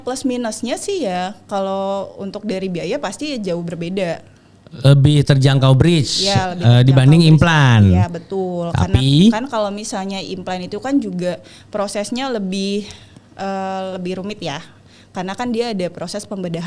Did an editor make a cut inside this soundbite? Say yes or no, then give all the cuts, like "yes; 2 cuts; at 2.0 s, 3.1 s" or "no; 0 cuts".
no; 0 cuts